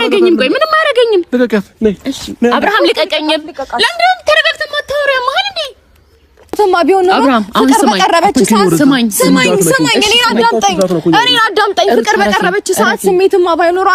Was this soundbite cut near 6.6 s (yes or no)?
yes